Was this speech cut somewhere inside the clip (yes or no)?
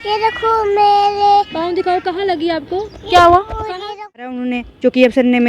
yes